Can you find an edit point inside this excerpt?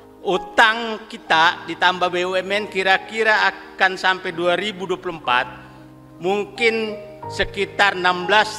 no; 0 cuts

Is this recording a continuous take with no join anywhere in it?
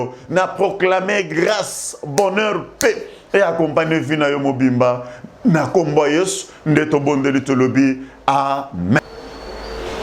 no; 1 cut; at 9.0 s

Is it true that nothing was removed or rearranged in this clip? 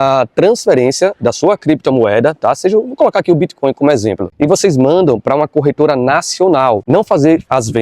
no; 1 cut; at 6.8 s

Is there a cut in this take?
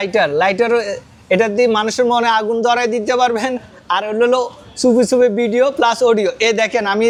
no; 0 cuts

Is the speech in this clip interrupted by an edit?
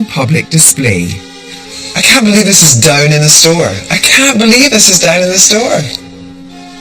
yes; 1 cut; at 5.0 s

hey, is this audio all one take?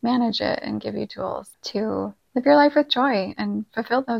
no; 1 cut; at 1.7 s

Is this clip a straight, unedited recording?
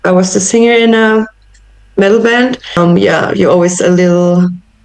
no; 1 cut; at 2.8 s

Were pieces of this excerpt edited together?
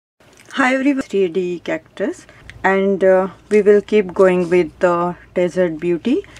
yes; 1 cut; at 1.0 s

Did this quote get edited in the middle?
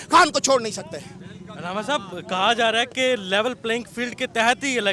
no; 0 cuts

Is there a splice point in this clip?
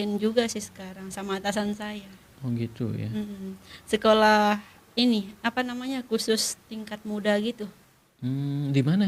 no; 0 cuts

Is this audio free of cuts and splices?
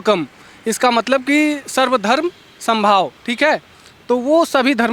yes; 0 cuts

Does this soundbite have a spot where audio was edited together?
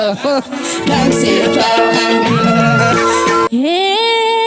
yes; 1 cut; at 3.5 s

